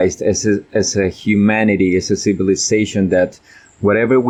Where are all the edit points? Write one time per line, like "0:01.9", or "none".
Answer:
none

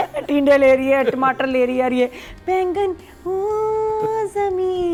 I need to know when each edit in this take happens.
none

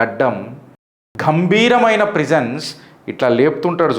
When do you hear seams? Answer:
0:01.0

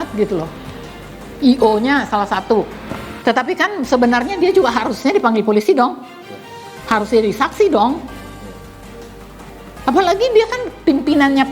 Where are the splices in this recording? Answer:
0:03.0

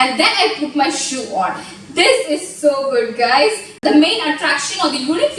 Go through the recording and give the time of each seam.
0:03.7

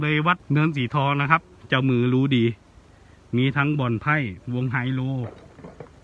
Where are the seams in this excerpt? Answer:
0:01.5

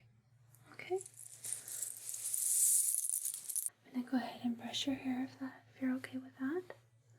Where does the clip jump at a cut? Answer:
0:03.8

